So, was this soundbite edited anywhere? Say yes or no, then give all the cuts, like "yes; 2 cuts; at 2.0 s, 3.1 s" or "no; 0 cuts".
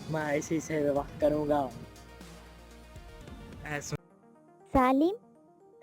yes; 1 cut; at 4.0 s